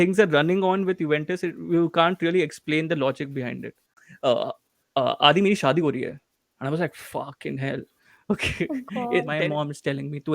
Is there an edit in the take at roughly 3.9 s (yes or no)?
yes